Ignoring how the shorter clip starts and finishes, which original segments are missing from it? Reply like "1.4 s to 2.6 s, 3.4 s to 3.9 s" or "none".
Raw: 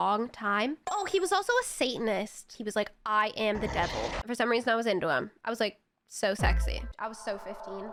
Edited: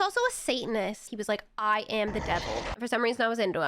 2.4 s to 2.5 s